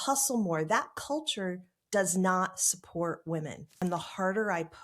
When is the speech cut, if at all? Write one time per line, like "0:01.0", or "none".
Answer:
0:03.7